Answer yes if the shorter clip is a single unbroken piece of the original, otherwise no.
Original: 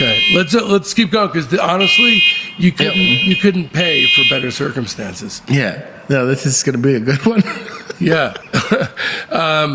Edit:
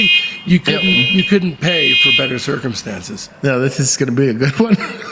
no